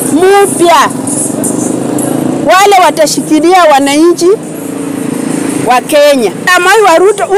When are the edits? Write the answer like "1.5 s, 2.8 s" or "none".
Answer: 6.5 s